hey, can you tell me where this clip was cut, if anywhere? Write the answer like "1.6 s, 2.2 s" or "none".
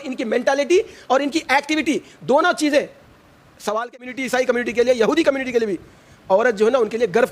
3.9 s